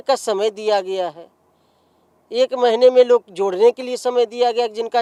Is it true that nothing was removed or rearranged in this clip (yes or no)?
yes